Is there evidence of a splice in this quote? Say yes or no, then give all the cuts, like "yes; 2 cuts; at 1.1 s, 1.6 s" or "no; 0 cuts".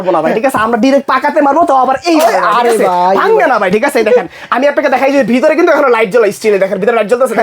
no; 0 cuts